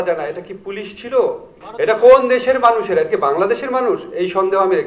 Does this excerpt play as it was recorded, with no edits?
no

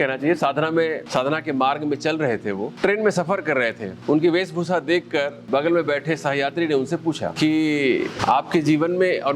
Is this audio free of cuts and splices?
no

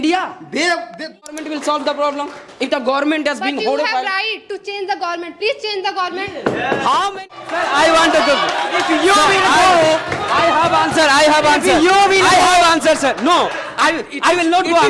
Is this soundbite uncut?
no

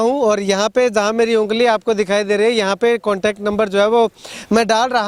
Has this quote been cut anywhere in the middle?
no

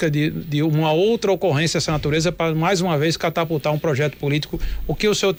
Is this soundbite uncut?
yes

